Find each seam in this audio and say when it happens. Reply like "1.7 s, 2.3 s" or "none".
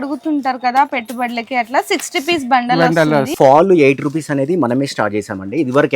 3.3 s